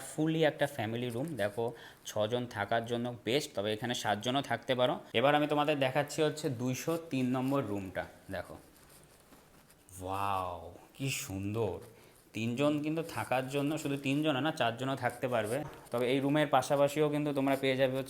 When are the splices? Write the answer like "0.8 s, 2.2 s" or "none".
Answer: 5.1 s, 15.7 s